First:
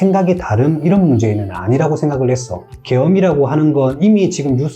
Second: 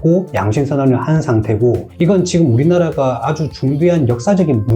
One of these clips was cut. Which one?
second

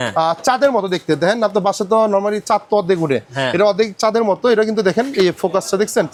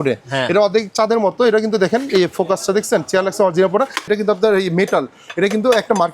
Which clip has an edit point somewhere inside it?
second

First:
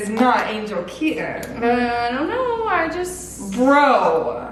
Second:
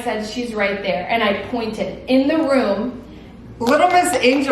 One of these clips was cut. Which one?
second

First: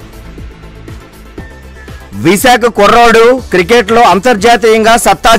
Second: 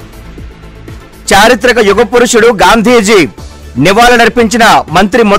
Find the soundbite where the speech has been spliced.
first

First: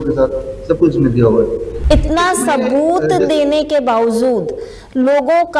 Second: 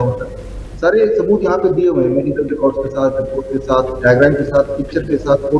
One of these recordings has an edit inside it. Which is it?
first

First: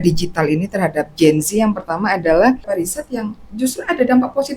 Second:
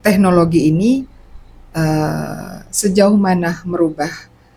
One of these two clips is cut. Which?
first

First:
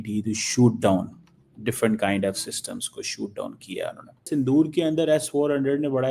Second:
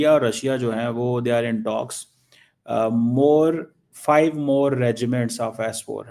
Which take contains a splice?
first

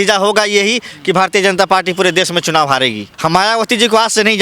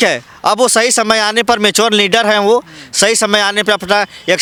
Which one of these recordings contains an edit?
first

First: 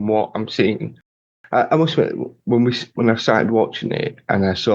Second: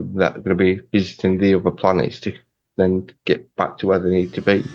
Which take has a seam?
first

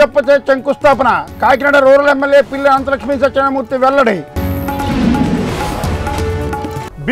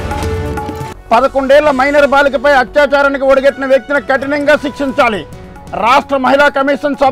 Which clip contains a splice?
second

